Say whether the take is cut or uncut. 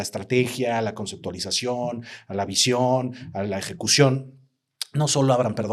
uncut